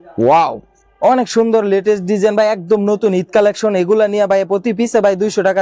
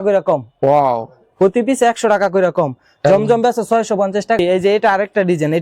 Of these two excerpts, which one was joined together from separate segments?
second; 1 cut; at 4.4 s

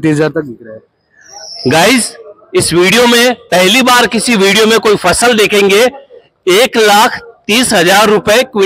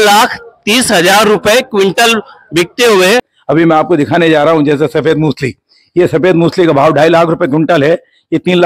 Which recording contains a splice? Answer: second; 1 cut; at 3.3 s

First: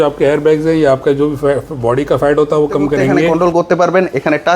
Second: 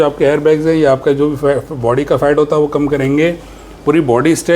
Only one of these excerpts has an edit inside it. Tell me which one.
first; 1 cut; at 3.3 s

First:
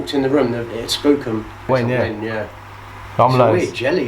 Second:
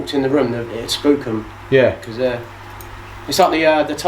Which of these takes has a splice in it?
first; 1 cut; at 1.7 s

